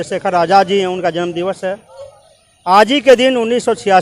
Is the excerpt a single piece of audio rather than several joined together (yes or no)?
yes